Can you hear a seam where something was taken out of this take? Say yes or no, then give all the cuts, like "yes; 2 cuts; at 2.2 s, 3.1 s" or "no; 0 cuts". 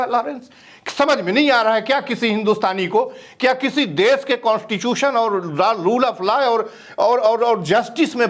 no; 0 cuts